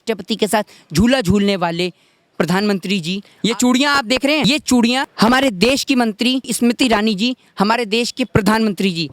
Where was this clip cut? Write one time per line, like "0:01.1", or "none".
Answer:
0:03.2
0:04.4
0:05.1
0:06.5
0:08.2